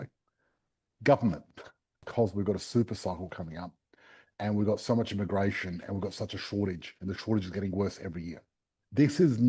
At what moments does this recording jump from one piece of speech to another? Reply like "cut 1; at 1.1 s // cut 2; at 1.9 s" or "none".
cut 1; at 2.0 s